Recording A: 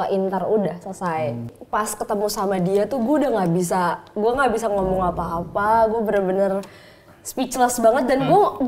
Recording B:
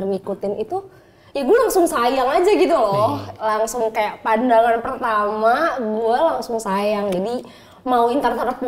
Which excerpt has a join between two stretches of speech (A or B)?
A